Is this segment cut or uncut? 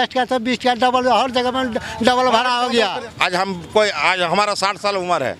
cut